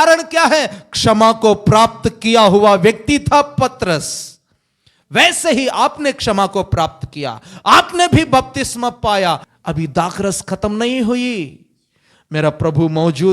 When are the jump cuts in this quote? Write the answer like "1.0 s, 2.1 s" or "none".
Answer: 9.5 s